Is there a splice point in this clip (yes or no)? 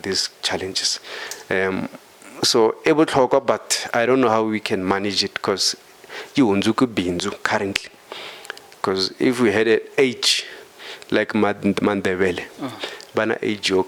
no